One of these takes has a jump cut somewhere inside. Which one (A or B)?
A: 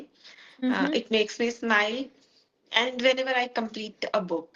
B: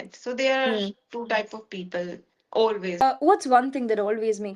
B